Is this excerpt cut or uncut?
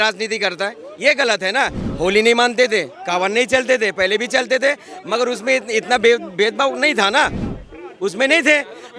cut